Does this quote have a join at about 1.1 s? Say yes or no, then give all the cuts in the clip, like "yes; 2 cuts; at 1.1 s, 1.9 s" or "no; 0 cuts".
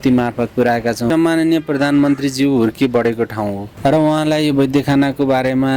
yes; 1 cut; at 1.1 s